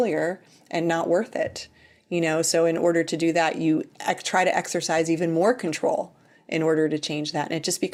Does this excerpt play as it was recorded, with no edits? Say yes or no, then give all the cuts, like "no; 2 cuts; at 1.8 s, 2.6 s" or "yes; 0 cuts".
yes; 0 cuts